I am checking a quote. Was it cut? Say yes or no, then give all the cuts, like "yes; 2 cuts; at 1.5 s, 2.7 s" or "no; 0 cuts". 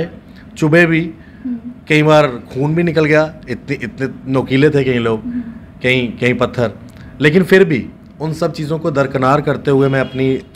no; 0 cuts